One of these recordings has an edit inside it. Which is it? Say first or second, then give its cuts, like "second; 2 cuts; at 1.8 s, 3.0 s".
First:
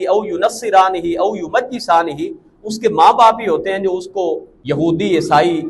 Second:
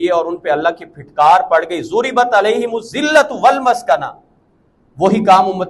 first; 1 cut; at 4.5 s